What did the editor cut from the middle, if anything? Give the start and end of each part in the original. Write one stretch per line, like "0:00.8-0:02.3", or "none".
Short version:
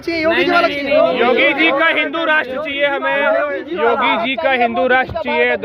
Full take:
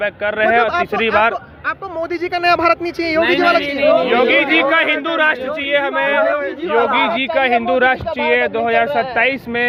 none